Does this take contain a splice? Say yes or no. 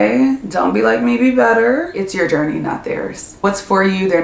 yes